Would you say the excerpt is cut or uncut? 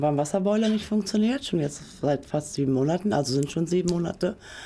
uncut